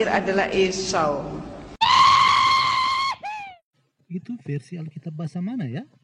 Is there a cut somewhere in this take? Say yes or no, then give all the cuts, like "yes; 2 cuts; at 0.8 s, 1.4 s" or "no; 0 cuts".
no; 0 cuts